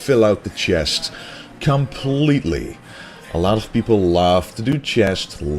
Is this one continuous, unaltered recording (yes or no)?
no